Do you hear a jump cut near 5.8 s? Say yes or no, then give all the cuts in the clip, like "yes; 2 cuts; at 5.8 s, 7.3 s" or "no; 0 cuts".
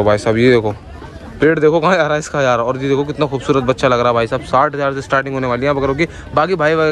no; 0 cuts